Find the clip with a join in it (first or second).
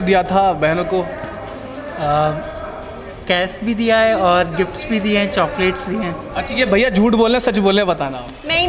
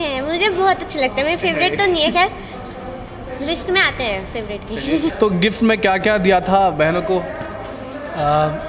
second